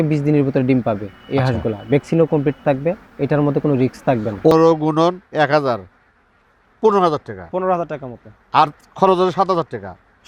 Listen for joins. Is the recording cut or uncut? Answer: cut